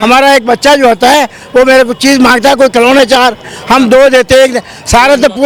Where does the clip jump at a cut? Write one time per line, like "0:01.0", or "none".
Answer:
none